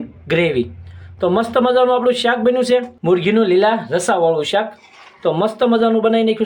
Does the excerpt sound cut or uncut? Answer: cut